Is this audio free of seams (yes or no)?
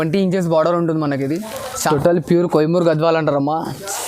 no